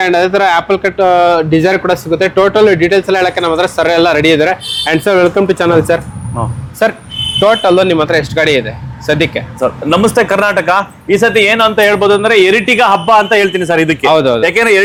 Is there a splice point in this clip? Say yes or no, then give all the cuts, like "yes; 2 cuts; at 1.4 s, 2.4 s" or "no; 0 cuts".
no; 0 cuts